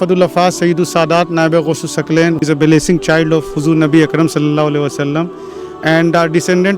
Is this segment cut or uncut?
uncut